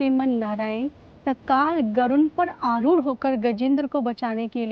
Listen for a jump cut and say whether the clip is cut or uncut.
uncut